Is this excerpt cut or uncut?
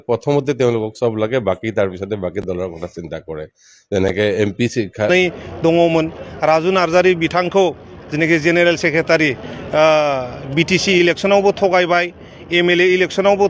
cut